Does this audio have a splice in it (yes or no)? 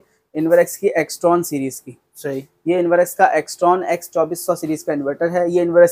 no